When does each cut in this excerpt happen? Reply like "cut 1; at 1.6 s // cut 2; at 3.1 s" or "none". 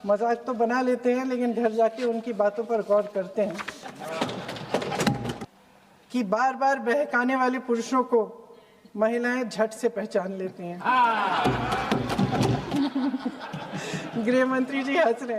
cut 1; at 5.4 s // cut 2; at 12.7 s